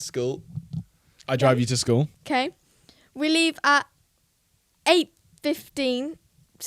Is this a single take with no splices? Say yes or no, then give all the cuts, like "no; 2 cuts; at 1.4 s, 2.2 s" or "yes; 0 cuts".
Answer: no; 1 cut; at 2.2 s